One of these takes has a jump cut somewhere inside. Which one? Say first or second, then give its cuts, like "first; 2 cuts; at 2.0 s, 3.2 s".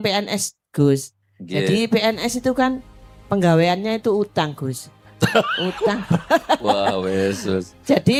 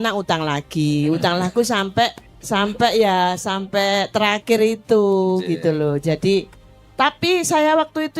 second; 1 cut; at 2.3 s